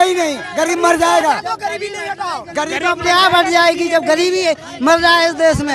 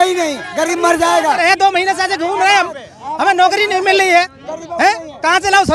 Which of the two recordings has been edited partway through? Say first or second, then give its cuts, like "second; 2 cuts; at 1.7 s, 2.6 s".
second; 1 cut; at 1.2 s